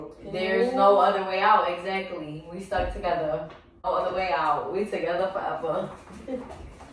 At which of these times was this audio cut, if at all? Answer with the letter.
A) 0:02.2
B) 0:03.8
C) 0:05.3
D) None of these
B